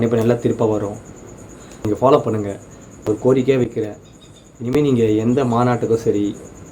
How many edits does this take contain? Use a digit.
2